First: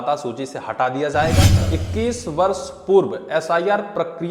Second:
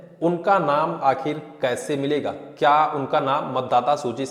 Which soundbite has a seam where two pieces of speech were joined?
first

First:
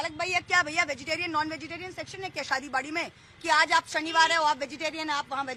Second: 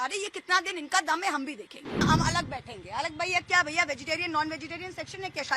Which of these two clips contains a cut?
second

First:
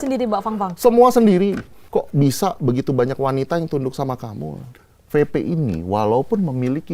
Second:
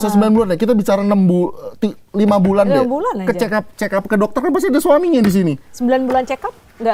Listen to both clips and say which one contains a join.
first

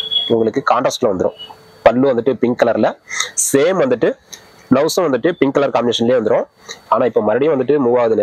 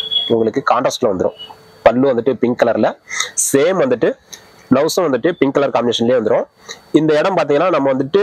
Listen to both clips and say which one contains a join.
first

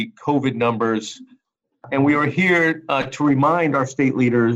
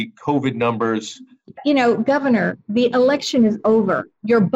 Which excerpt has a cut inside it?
second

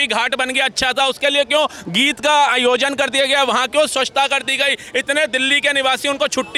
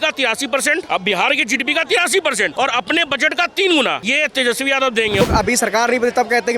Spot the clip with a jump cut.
second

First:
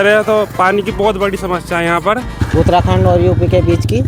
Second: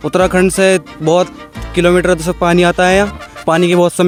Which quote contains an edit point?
first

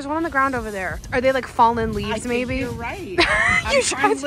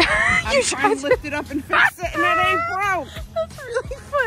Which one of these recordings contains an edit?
first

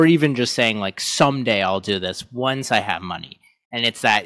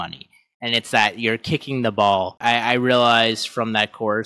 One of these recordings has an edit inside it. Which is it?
second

